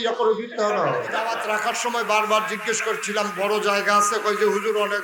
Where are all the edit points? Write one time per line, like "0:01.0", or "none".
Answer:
0:01.4